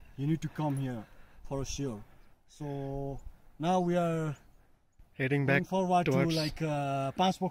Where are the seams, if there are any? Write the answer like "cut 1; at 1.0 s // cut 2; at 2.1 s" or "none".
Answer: none

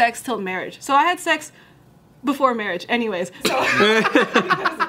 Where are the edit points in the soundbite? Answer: cut 1; at 3.4 s

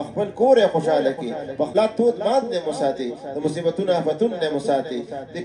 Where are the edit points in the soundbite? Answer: cut 1; at 1.7 s

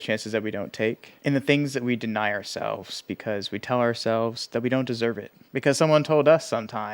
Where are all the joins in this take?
cut 1; at 1.1 s // cut 2; at 5.3 s

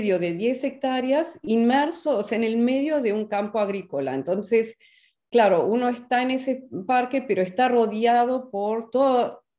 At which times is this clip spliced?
none

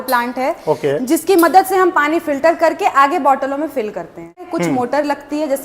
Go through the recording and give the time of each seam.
cut 1; at 4.4 s

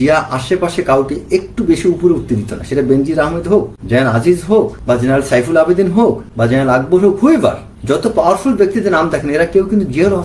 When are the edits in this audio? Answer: cut 1; at 3.8 s // cut 2; at 4.8 s // cut 3; at 6.3 s // cut 4; at 7.7 s

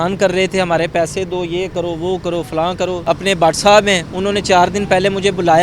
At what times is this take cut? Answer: cut 1; at 3.0 s

